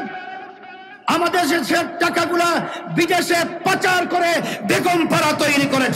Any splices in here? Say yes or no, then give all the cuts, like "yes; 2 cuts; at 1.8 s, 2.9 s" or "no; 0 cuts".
no; 0 cuts